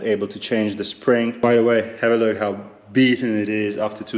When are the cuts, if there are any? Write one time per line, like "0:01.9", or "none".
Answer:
0:01.4